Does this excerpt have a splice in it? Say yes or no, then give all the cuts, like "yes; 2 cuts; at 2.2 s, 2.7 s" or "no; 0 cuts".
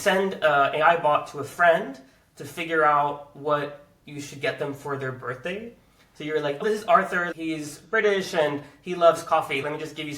yes; 1 cut; at 6.6 s